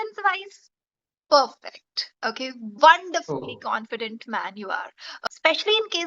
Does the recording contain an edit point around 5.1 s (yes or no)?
yes